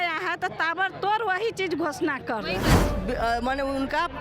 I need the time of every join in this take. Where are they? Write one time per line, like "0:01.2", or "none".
0:02.8